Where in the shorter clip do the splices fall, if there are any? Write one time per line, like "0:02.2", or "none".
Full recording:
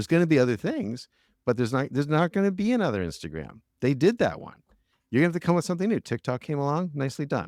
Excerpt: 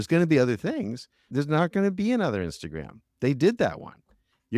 0:01.3